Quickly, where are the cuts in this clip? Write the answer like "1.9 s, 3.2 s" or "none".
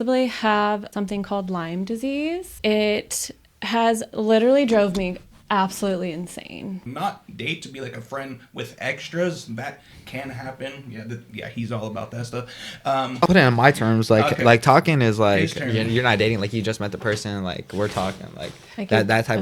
0.9 s, 2.5 s, 6.8 s, 13.3 s